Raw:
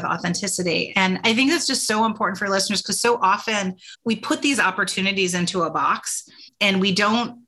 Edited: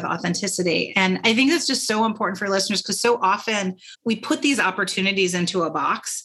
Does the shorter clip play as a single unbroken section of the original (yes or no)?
yes